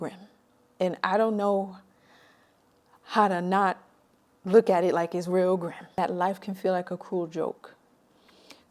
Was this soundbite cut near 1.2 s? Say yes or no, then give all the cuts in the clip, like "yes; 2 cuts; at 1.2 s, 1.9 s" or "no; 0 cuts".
no; 1 cut; at 6.0 s